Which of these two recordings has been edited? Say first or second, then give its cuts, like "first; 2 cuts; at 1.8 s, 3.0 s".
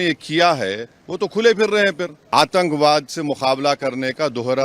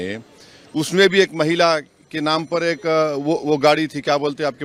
first; 1 cut; at 2.2 s